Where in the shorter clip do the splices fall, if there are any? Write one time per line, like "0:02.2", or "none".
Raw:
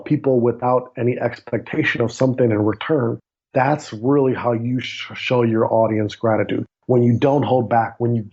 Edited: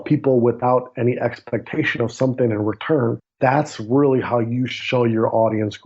0:03.2
0:04.8

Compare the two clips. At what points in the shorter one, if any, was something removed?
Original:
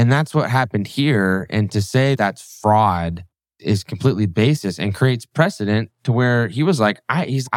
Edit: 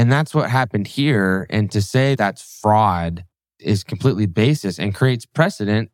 none

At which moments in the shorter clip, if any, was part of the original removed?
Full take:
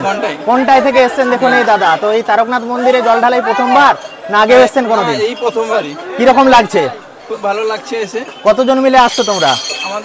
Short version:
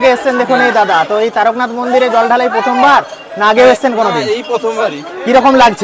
none

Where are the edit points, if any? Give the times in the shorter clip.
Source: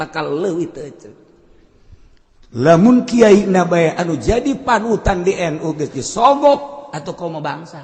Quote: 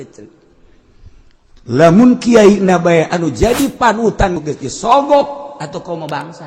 0:04.3

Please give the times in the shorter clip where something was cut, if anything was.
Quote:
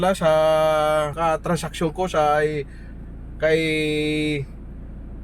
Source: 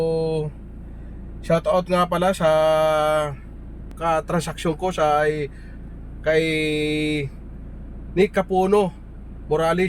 0:01.1

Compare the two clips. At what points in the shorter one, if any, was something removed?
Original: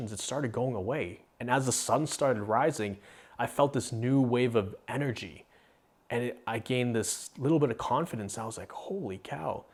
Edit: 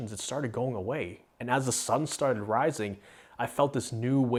none

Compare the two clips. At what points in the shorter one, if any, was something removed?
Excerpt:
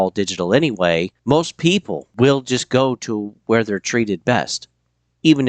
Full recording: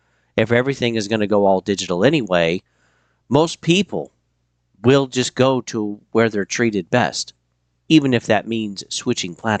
0:01.2
0:02.0

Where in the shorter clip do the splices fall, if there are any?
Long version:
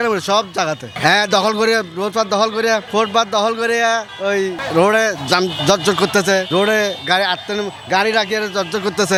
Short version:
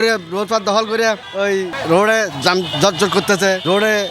0:01.2

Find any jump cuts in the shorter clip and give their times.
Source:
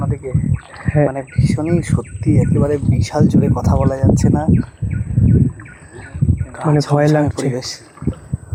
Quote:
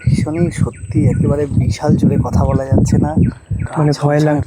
0:03.6

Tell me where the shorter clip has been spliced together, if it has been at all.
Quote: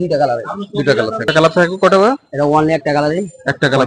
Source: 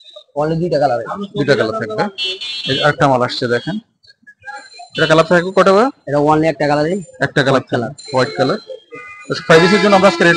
0:01.3

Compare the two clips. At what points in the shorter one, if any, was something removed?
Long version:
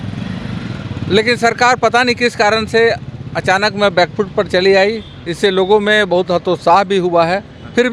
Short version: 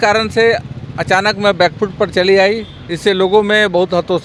none

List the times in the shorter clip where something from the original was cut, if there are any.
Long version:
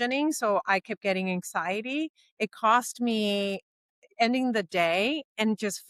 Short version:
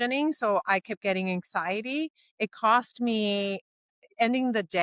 none

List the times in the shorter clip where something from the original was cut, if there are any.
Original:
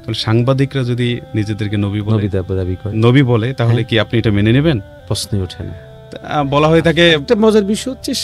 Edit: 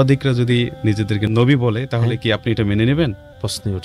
0:01.2

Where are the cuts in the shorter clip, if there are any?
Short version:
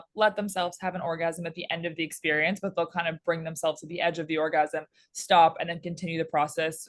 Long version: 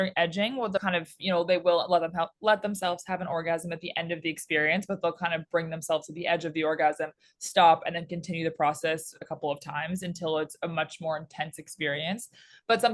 none

